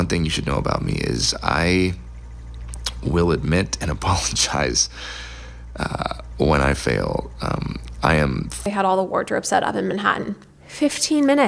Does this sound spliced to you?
yes; 1 cut; at 8.6 s

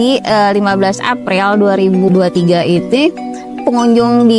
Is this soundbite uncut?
no; 2 cuts; at 2.1 s, 3.6 s

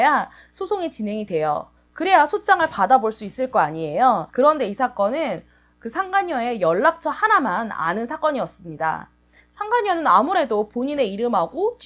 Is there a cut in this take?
no; 0 cuts

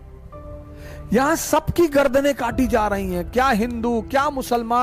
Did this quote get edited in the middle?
no; 0 cuts

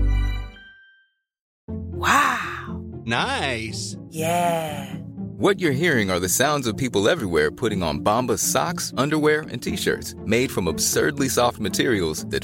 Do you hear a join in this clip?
yes; 1 cut; at 1.5 s

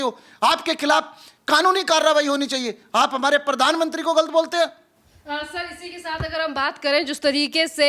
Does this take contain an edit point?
no; 0 cuts

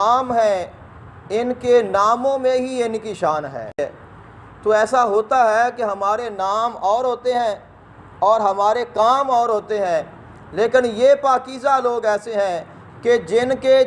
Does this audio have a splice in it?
yes; 1 cut; at 3.8 s

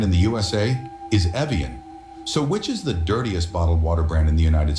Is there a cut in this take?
no; 0 cuts

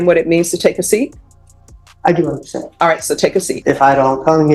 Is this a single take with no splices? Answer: no; 1 cut; at 3.5 s

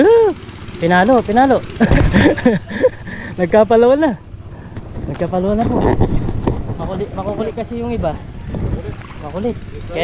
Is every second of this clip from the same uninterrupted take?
no; 1 cut; at 1.9 s

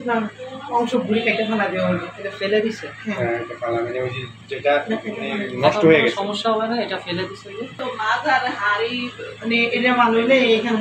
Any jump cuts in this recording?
yes; 1 cut; at 7.7 s

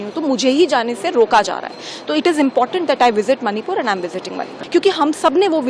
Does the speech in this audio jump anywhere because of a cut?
yes; 1 cut; at 4.5 s

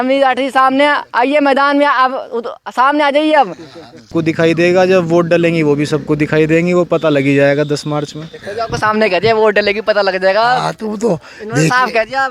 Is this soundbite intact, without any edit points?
no; 1 cut; at 4.1 s

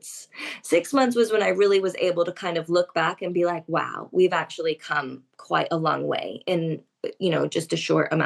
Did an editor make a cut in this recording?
no; 0 cuts

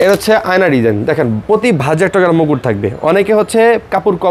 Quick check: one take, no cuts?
yes; 0 cuts

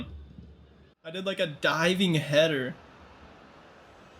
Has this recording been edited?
yes; 1 cut; at 1.2 s

